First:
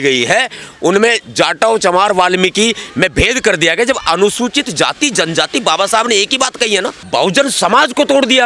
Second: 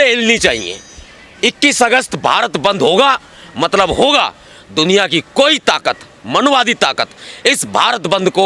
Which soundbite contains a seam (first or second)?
first